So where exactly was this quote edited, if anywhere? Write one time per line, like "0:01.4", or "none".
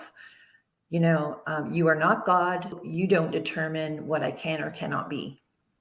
0:02.8

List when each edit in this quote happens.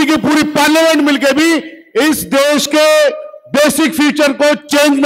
none

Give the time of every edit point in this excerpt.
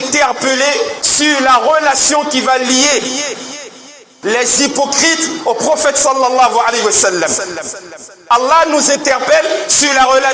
0:01.0

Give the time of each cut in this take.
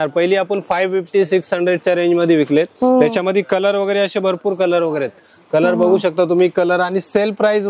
none

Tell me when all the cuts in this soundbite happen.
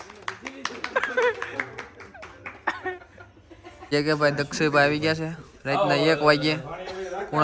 0:03.9

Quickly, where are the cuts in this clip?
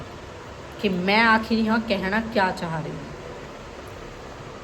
none

